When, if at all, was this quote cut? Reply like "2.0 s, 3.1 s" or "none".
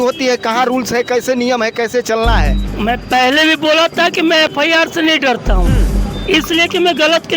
2.7 s